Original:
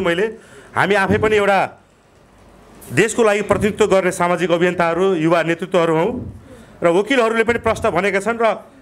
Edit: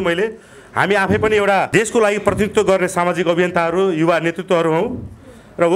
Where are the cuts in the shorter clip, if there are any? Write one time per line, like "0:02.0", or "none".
0:01.7